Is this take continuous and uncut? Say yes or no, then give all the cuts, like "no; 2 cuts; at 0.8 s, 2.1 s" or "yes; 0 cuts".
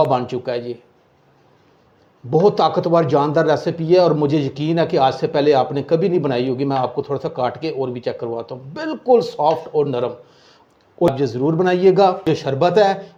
yes; 0 cuts